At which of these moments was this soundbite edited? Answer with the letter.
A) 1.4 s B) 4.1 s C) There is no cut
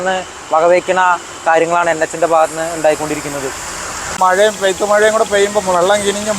B